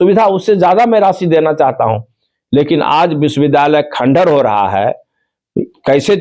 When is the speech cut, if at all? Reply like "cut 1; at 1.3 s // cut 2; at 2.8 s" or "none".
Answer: none